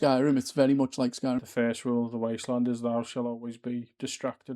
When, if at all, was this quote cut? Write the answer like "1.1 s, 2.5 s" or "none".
1.5 s